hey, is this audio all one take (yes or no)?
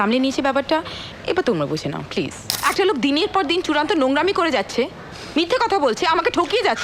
no